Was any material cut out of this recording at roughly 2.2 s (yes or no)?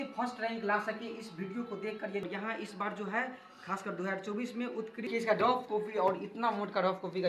yes